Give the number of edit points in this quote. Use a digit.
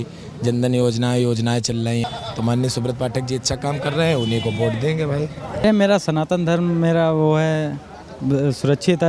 2